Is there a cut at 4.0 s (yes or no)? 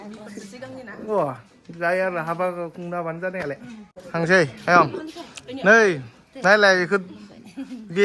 yes